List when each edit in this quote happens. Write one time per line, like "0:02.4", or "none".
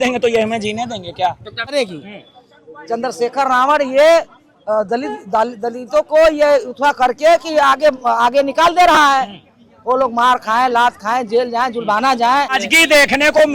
0:01.7
0:12.7

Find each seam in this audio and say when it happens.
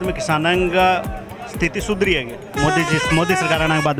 none

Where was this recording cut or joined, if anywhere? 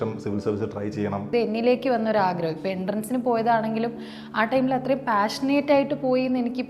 0:01.3

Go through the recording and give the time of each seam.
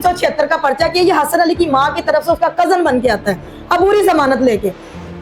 none

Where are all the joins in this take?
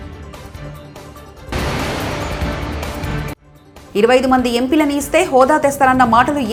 none

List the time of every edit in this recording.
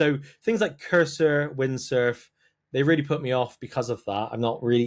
none

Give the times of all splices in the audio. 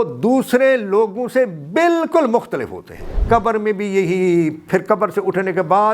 0:03.1

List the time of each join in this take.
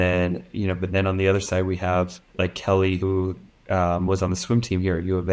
0:02.2

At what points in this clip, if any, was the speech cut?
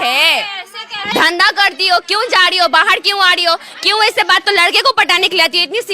0:01.0
0:04.5

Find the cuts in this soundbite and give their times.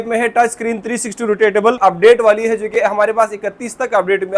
0:01.8

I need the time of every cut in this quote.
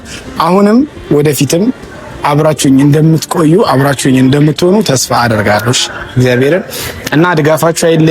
none

